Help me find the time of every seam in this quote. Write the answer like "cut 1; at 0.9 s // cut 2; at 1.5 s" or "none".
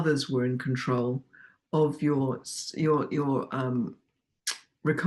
none